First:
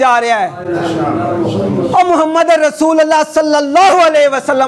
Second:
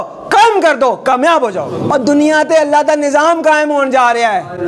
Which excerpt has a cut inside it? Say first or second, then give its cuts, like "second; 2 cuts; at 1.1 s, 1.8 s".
second; 1 cut; at 1.7 s